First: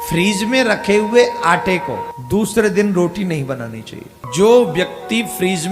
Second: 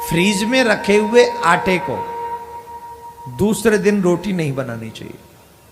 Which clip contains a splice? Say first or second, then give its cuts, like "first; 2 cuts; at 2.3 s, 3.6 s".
first; 2 cuts; at 2.1 s, 4.2 s